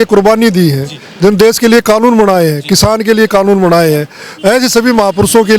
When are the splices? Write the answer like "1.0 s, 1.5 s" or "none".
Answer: none